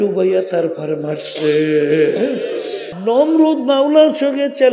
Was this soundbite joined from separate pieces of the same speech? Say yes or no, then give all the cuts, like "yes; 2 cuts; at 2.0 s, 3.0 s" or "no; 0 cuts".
yes; 1 cut; at 2.8 s